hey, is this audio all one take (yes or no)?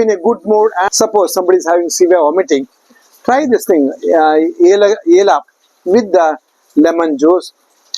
no